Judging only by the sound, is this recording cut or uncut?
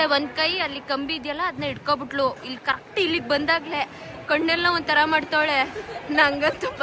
uncut